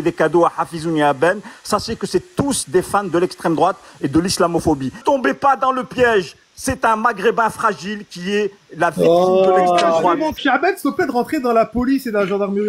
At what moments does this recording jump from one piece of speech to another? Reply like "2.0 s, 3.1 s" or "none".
5.0 s, 10.4 s